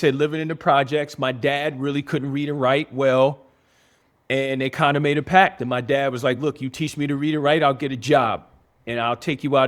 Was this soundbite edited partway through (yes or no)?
no